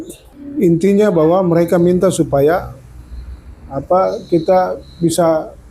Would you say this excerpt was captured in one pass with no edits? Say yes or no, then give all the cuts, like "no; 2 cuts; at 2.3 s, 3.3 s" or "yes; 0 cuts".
yes; 0 cuts